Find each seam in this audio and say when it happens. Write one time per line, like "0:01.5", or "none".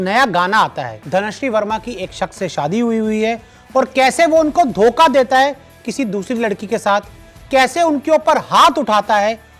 0:00.9